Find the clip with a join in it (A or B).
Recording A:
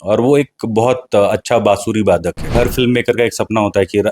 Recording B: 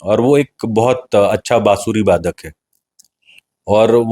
A